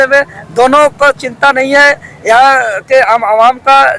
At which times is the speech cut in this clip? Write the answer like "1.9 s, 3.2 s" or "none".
none